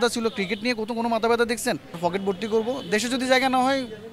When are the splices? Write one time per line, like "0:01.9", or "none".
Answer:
0:02.0